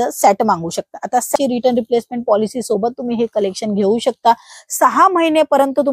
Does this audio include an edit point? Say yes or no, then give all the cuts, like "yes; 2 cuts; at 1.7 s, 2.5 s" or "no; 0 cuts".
yes; 1 cut; at 1.3 s